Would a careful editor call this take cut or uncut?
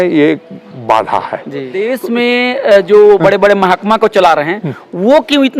cut